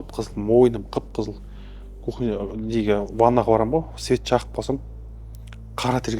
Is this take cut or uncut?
uncut